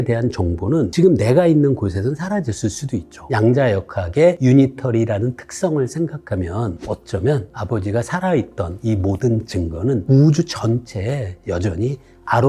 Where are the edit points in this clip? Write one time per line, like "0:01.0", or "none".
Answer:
0:03.1
0:04.4
0:06.8